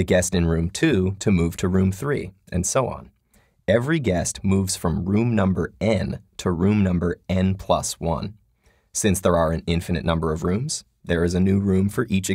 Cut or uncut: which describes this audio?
uncut